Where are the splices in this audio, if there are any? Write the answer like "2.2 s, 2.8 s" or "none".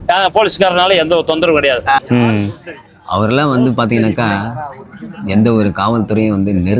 2.0 s